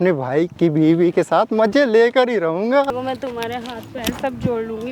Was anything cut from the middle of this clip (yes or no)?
yes